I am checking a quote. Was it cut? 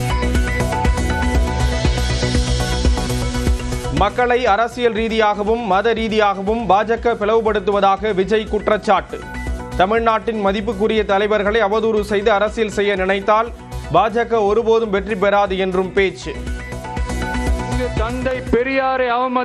yes; 1 cut; at 1.0 s

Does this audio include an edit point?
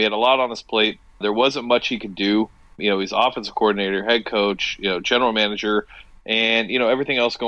yes; 2 cuts; at 1.2 s, 2.8 s

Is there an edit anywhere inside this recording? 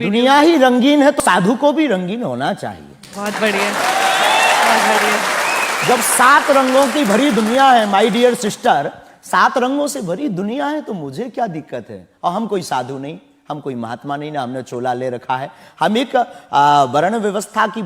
yes; 1 cut; at 1.2 s

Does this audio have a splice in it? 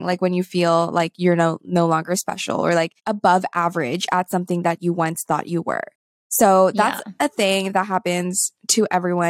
no; 0 cuts

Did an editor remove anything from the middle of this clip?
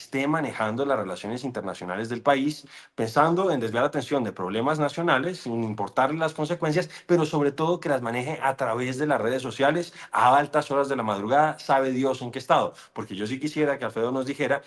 no; 0 cuts

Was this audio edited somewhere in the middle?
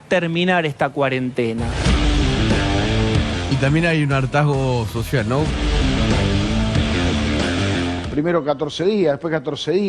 yes; 3 cuts; at 3.5 s, 5.6 s, 8.0 s

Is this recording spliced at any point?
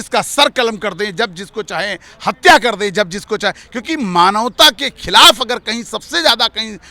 no; 0 cuts

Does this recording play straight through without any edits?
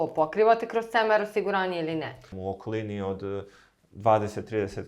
no; 1 cut; at 2.3 s

